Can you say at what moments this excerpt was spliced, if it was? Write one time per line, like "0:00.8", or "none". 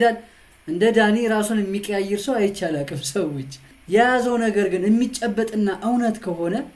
0:03.7